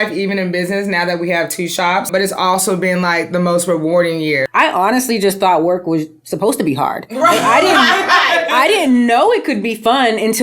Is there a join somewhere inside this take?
yes; 2 cuts; at 2.1 s, 4.5 s

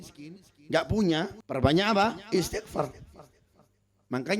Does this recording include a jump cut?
yes; 1 cut; at 1.4 s

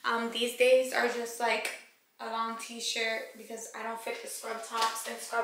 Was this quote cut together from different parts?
no; 0 cuts

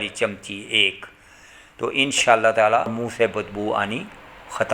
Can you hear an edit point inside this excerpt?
yes; 1 cut; at 2.9 s

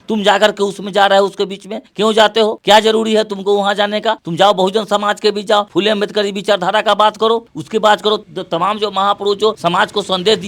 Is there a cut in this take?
no; 0 cuts

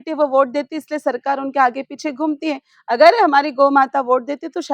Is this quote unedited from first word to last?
yes; 0 cuts

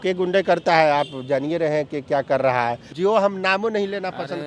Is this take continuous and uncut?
no; 1 cut; at 2.9 s

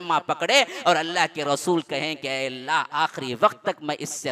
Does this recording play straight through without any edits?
yes; 0 cuts

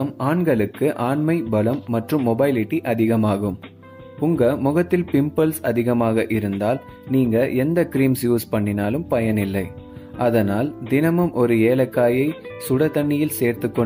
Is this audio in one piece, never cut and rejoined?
yes; 0 cuts

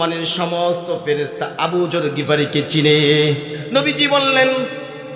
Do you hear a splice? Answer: yes; 1 cut; at 3.6 s

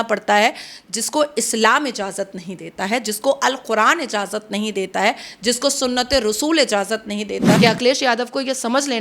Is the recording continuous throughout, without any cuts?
no; 1 cut; at 7.6 s

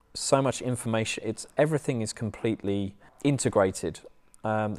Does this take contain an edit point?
yes; 1 cut; at 3.0 s

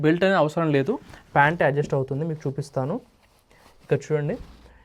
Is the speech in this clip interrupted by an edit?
no; 0 cuts

